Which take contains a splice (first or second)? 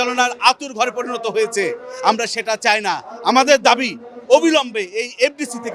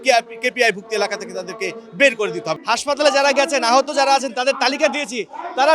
second